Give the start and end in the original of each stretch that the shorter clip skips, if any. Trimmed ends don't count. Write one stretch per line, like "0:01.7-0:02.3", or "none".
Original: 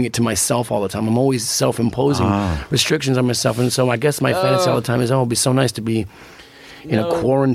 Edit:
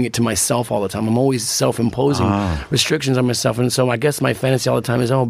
none